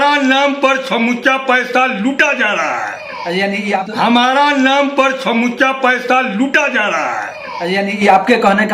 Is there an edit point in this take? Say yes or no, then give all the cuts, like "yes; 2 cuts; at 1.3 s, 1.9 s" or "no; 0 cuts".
yes; 1 cut; at 3.9 s